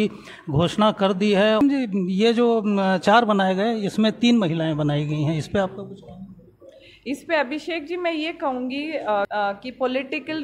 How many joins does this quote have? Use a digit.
2